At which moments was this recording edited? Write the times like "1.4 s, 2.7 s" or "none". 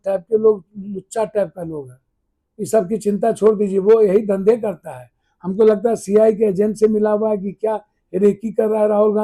none

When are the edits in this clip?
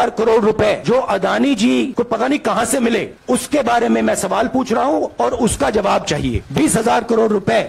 1.9 s, 6.4 s

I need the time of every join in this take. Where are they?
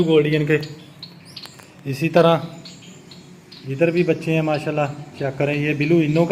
none

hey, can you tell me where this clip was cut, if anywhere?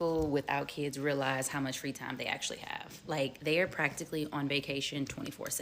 3.0 s

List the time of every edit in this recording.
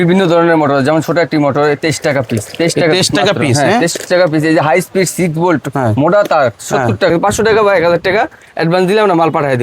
7.1 s

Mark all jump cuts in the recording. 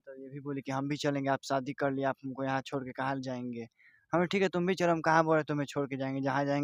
none

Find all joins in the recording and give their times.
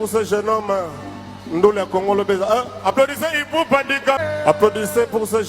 3.1 s, 4.2 s

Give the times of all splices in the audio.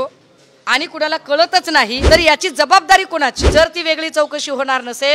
2.0 s, 3.4 s

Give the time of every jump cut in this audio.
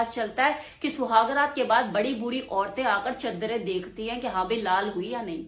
none

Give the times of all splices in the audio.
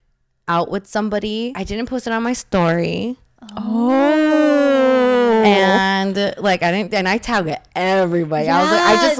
1.6 s

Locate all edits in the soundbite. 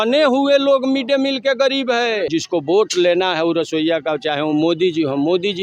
2.3 s

